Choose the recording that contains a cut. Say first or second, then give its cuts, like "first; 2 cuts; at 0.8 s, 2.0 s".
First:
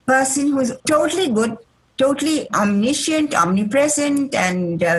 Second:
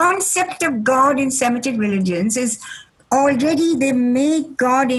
first; 2 cuts; at 0.8 s, 2.5 s